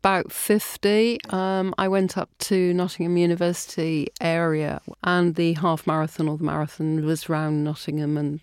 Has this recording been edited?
yes; 1 cut; at 4.8 s

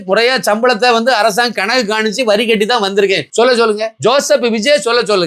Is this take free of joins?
yes; 0 cuts

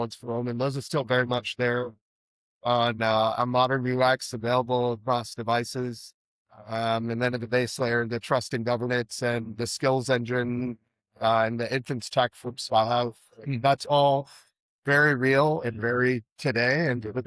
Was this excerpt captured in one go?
yes; 0 cuts

